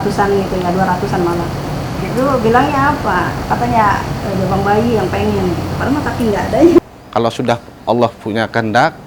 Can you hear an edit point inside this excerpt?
yes; 1 cut; at 6.8 s

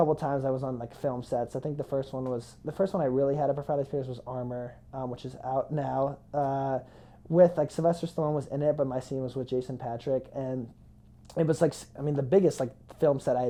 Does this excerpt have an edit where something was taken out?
no; 0 cuts

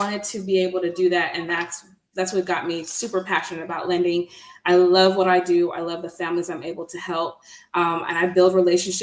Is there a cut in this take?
no; 0 cuts

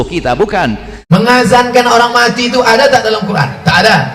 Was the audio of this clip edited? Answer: yes; 1 cut; at 0.9 s

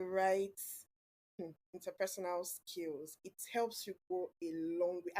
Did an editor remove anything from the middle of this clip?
no; 0 cuts

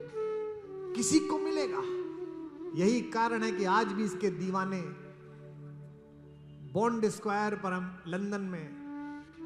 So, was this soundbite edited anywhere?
no; 0 cuts

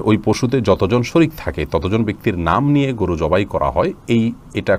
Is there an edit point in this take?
no; 0 cuts

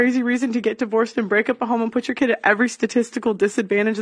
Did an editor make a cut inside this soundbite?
no; 0 cuts

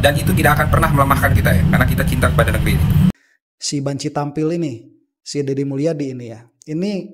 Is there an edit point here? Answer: yes; 1 cut; at 3.3 s

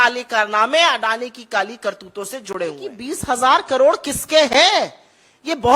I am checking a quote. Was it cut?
yes; 1 cut; at 2.9 s

